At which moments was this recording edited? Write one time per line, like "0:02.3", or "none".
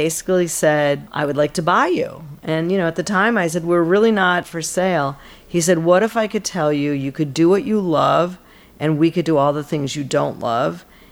0:01.1
0:04.5